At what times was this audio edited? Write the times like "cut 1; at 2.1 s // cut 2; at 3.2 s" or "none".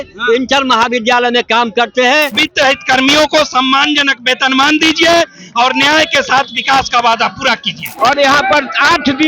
cut 1; at 2.4 s // cut 2; at 7.8 s